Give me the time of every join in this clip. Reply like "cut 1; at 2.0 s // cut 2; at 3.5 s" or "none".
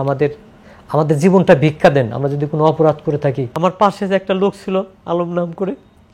cut 1; at 3.5 s